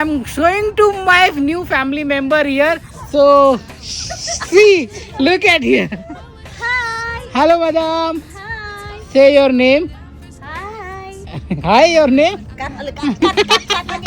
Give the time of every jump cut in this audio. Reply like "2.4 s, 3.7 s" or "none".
none